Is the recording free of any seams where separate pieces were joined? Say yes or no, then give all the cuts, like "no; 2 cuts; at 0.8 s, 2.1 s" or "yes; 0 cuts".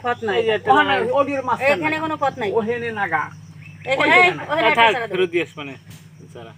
yes; 0 cuts